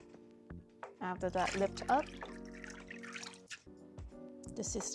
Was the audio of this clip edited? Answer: yes; 1 cut; at 3.5 s

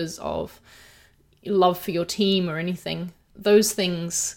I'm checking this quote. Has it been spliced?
yes; 1 cut; at 3.2 s

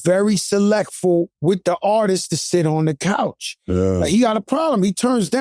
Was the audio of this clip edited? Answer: yes; 1 cut; at 1.3 s

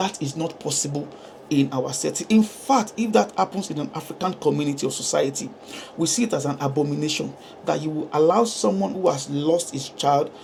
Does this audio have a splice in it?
no; 0 cuts

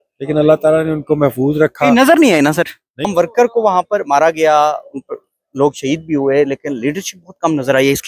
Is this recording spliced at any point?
yes; 1 cut; at 3.1 s

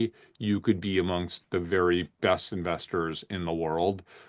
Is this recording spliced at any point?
no; 0 cuts

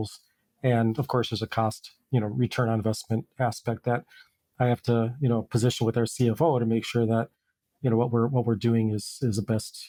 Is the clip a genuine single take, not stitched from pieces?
yes; 0 cuts

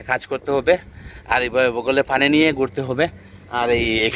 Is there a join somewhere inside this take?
no; 0 cuts

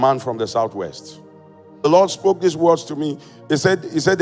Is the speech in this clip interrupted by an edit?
yes; 1 cut; at 1.9 s

